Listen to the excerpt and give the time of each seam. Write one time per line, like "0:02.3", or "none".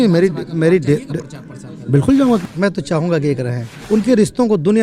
0:02.4
0:03.8